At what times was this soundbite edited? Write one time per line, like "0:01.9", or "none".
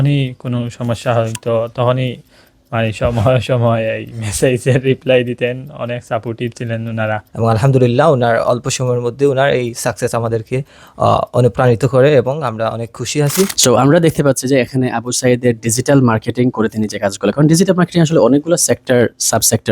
0:07.3
0:13.5

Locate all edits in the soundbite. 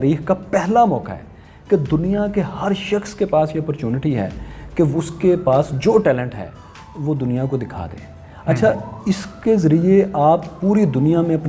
none

